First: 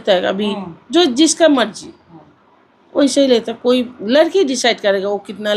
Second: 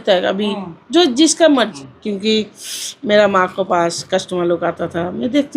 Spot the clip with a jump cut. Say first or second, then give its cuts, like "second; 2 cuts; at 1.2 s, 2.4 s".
second; 1 cut; at 1.9 s